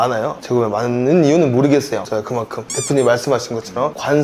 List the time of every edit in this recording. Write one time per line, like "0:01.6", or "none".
none